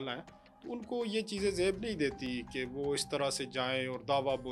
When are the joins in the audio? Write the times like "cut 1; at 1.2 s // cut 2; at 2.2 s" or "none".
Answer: none